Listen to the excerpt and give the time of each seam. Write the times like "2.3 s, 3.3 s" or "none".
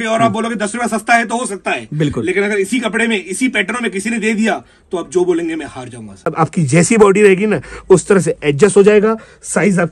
6.3 s